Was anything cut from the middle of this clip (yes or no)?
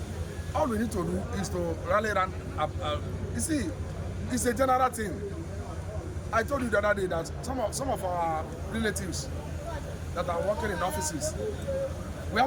no